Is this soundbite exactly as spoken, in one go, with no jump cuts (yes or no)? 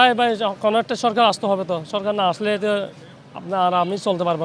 yes